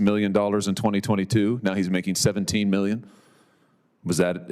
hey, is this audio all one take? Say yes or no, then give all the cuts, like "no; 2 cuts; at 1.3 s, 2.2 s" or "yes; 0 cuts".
yes; 0 cuts